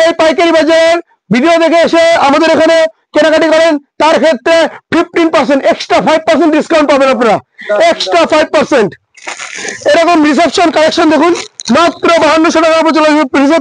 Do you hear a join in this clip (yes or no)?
no